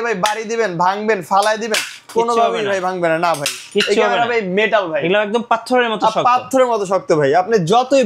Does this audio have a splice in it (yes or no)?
no